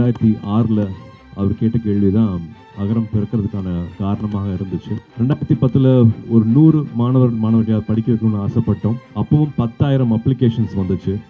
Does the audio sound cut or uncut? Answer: cut